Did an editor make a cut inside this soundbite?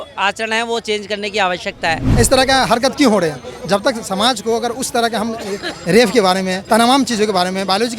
yes; 2 cuts; at 2.0 s, 6.6 s

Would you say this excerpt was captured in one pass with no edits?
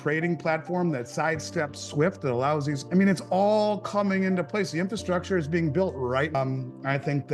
no; 2 cuts; at 2.8 s, 6.3 s

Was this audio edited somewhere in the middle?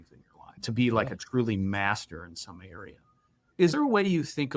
no; 0 cuts

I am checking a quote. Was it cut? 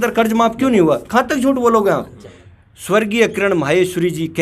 yes; 1 cut; at 2.2 s

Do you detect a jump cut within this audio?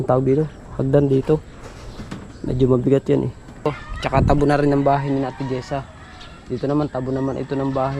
yes; 1 cut; at 3.7 s

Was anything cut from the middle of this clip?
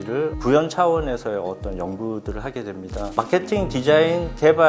yes; 1 cut; at 3.1 s

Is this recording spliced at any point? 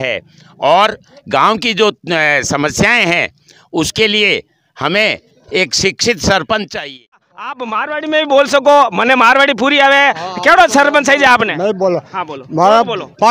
yes; 1 cut; at 7.5 s

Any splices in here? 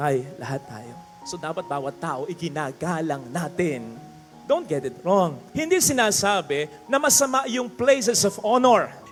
no; 0 cuts

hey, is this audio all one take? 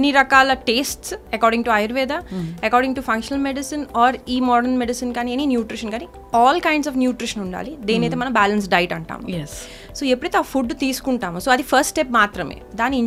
yes; 0 cuts

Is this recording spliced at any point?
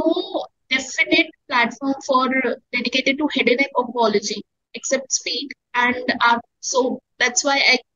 no; 0 cuts

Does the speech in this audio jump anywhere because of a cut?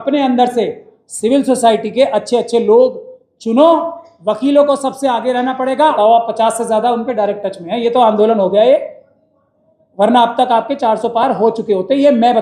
yes; 1 cut; at 6.0 s

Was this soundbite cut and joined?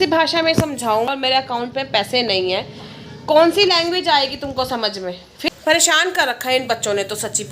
yes; 2 cuts; at 1.1 s, 5.5 s

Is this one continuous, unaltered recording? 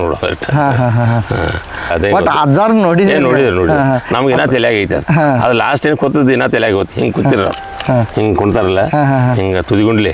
no; 1 cut; at 1.9 s

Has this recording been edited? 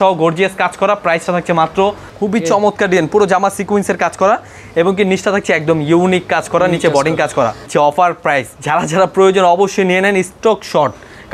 yes; 3 cuts; at 2.1 s, 7.6 s, 8.5 s

